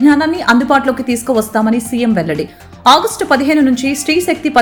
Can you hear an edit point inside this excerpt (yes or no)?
no